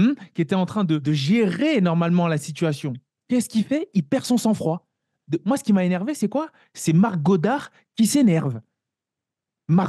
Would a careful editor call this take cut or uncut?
cut